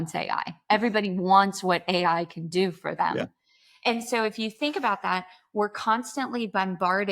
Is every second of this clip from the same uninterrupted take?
yes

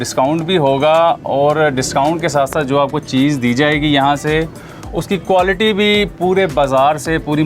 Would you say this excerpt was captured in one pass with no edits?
yes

